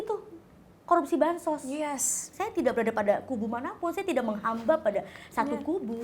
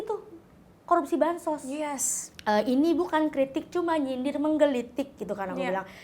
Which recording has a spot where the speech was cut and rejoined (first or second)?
first